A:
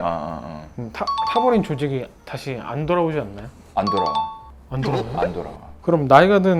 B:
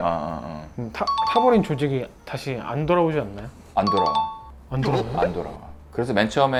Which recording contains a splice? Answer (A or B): A